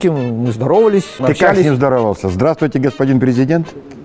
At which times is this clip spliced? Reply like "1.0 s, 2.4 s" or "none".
1.2 s